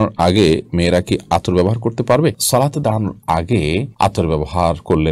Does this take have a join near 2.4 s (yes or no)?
no